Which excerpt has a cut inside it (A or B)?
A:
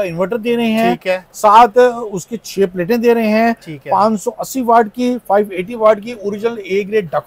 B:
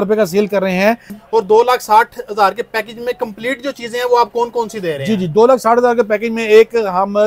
B